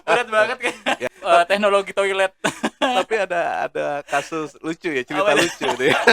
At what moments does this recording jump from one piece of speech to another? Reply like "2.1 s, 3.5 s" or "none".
1.0 s